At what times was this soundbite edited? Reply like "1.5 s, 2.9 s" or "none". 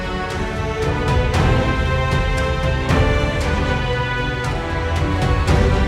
none